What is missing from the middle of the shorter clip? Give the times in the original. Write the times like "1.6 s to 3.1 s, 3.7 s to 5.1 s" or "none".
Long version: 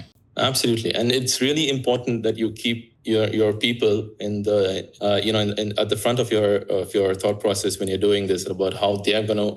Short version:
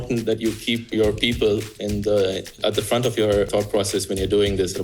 2.9 s to 3.3 s, 4.9 s to 5.6 s, 6.6 s to 7.2 s